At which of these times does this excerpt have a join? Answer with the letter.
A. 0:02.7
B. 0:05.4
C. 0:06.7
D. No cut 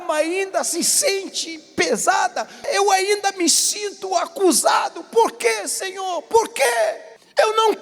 A